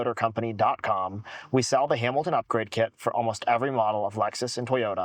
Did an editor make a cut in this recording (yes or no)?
no